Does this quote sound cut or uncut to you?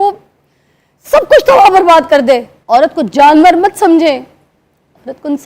cut